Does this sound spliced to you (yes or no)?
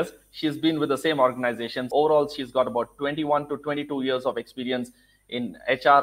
yes